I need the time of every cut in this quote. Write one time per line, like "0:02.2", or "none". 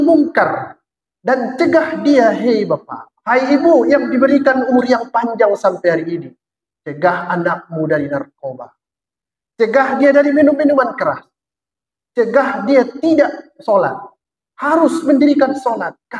none